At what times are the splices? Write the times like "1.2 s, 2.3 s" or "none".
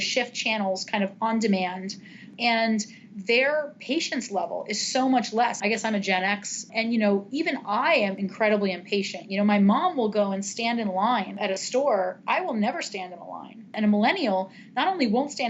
2.3 s, 5.6 s, 6.7 s, 8.2 s, 11.4 s, 13.7 s